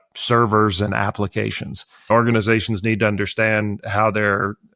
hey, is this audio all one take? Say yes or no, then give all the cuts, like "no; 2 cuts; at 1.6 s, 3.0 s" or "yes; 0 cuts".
no; 1 cut; at 2.1 s